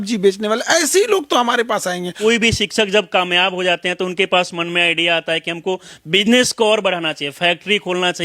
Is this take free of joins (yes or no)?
no